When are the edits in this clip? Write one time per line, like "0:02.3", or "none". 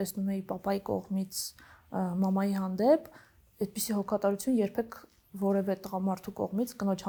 none